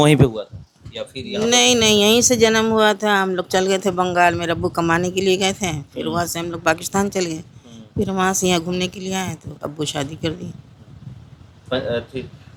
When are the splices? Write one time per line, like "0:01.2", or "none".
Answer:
none